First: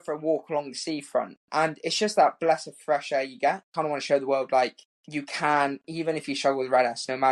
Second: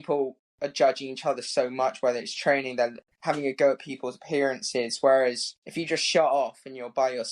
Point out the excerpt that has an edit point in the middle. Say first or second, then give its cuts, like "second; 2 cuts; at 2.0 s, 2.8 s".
first; 1 cut; at 3.7 s